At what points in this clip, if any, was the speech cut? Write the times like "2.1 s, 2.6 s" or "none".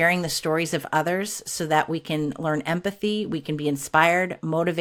none

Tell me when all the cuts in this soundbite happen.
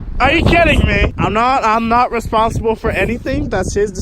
1.1 s

